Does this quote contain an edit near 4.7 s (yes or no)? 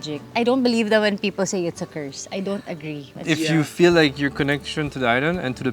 no